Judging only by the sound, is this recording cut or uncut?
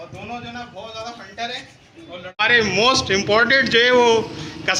cut